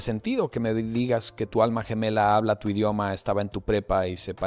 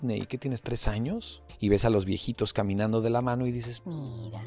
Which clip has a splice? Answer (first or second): second